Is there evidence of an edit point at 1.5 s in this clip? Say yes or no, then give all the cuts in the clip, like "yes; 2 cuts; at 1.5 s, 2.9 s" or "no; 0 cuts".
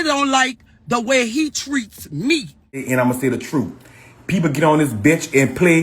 no; 1 cut; at 2.8 s